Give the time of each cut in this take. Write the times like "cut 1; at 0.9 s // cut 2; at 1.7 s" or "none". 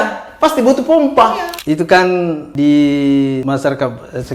cut 1; at 1.5 s // cut 2; at 2.5 s // cut 3; at 3.4 s